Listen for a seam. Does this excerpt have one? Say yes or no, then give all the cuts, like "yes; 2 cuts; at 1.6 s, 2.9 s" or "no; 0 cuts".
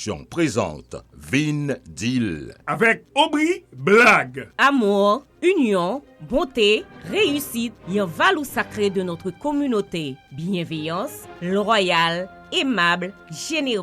yes; 1 cut; at 2.5 s